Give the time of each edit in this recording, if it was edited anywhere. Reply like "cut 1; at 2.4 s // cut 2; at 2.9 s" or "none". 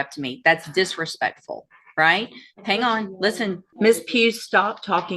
cut 1; at 3.7 s